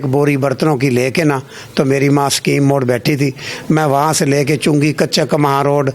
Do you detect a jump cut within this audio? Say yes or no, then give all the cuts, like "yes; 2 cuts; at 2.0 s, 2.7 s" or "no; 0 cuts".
no; 0 cuts